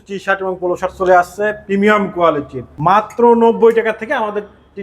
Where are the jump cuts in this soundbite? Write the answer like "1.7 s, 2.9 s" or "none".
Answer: 3.1 s